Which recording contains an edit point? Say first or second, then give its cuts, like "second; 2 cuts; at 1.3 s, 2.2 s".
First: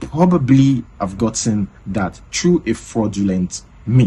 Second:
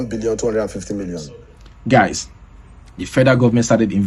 second; 1 cut; at 1.2 s